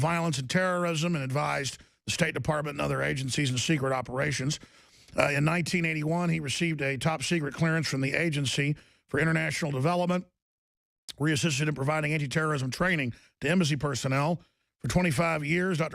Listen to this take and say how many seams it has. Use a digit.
1